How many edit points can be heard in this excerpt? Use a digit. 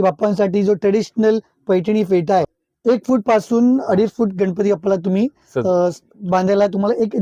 1